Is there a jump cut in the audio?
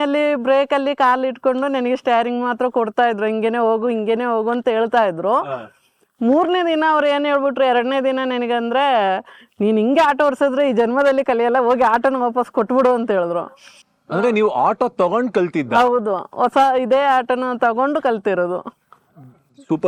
no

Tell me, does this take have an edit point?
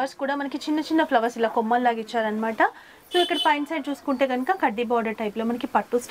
no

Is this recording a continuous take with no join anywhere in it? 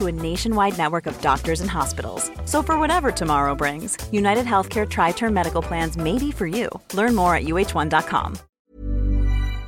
no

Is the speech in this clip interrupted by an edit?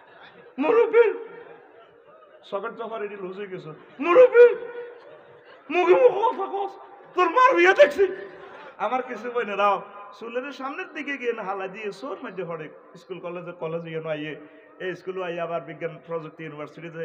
yes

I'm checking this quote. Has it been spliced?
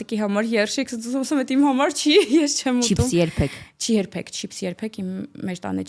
no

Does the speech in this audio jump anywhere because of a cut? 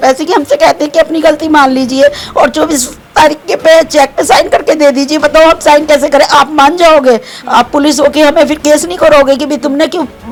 no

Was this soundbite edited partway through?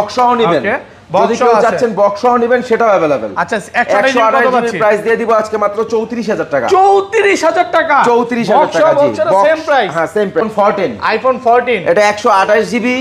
yes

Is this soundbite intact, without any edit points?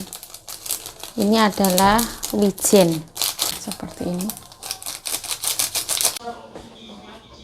no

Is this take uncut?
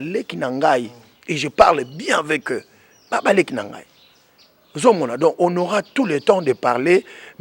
yes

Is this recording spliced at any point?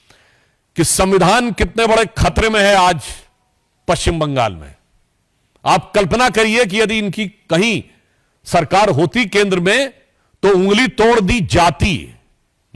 no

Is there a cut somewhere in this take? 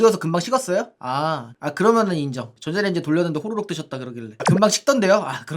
yes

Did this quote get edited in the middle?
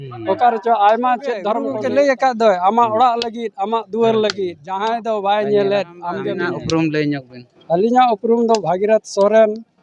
yes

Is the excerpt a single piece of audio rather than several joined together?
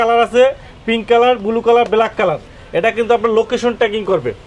yes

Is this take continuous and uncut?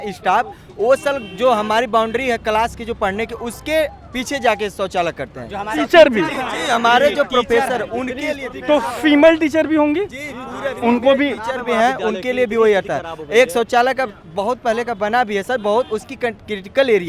yes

